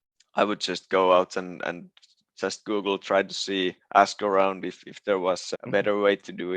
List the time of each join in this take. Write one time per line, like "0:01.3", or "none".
0:05.5